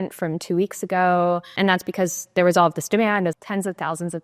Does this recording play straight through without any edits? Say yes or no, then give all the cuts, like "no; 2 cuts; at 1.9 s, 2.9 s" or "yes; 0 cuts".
no; 2 cuts; at 1.5 s, 3.3 s